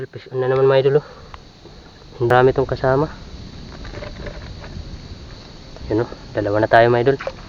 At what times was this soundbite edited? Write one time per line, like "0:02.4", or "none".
0:02.3